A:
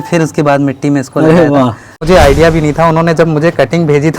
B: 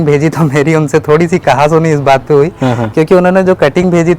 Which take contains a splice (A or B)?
A